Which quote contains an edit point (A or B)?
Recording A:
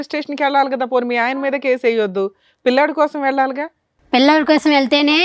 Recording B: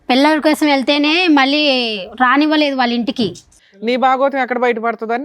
B